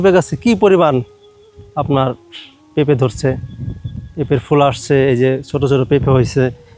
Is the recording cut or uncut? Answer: uncut